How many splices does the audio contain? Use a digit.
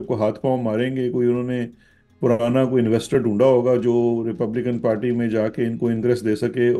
0